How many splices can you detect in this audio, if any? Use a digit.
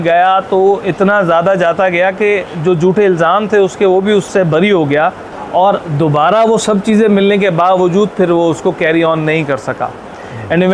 2